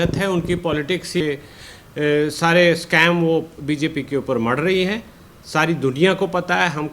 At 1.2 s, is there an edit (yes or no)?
yes